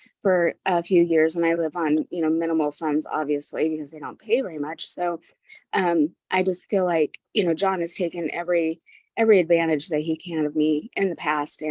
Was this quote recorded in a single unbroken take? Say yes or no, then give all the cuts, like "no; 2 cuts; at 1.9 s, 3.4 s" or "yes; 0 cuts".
yes; 0 cuts